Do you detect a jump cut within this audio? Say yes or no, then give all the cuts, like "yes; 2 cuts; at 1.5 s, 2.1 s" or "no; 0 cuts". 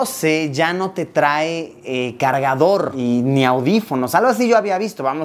no; 0 cuts